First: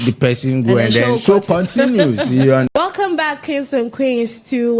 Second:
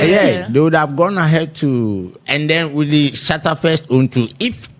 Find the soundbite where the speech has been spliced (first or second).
first